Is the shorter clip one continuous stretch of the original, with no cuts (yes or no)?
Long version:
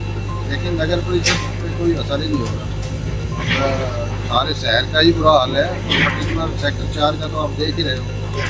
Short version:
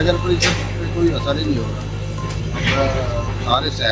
yes